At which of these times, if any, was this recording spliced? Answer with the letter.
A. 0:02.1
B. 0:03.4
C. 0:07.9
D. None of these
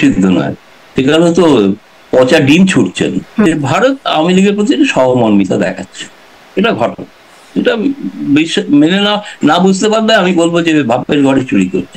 B